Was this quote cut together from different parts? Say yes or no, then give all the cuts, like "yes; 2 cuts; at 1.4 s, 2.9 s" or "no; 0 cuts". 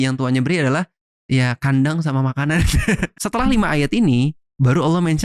yes; 1 cut; at 3.1 s